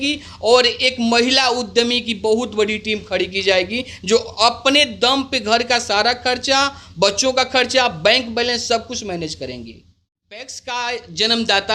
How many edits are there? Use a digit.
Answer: 1